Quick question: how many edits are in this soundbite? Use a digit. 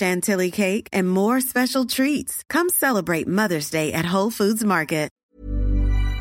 1